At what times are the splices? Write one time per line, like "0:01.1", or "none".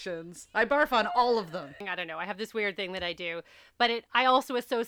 0:01.7